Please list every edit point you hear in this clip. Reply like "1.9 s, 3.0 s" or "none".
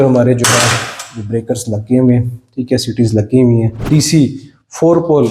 3.8 s